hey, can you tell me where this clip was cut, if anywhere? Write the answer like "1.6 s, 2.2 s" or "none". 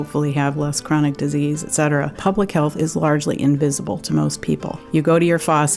2.2 s, 4.7 s